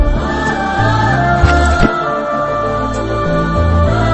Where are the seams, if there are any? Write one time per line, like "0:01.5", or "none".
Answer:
none